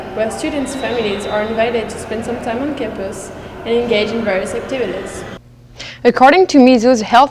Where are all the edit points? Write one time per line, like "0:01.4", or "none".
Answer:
0:05.4